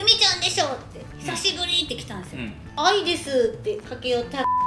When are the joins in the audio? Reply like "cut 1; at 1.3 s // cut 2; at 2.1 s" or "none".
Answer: cut 1; at 2.7 s